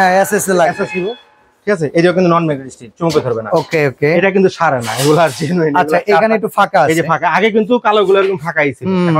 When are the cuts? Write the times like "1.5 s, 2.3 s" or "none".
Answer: none